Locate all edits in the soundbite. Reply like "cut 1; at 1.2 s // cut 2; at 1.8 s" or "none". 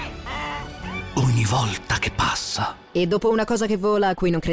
cut 1; at 1.1 s // cut 2; at 2.8 s